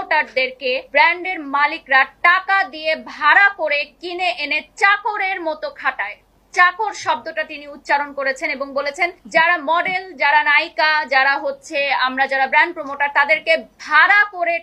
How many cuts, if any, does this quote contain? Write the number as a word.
two